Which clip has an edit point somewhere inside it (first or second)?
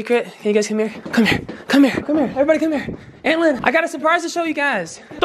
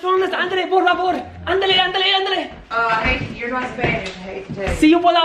first